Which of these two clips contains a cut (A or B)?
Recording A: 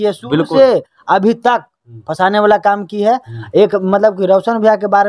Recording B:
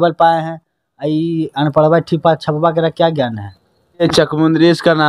B